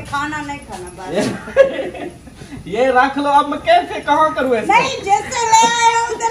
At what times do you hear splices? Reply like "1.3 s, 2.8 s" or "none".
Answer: none